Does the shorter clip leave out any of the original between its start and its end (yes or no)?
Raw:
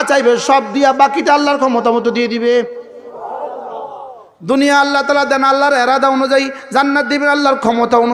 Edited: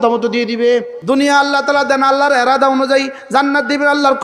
yes